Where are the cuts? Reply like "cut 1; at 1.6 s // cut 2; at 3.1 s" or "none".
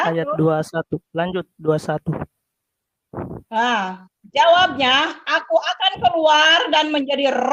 none